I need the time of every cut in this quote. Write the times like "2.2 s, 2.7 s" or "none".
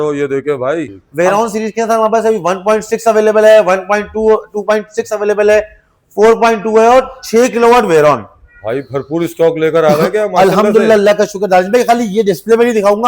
1.0 s